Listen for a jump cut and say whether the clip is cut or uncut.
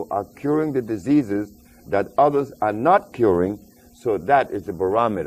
uncut